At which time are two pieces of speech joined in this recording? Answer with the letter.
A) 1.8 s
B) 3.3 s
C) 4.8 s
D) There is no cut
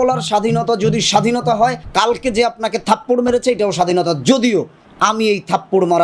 A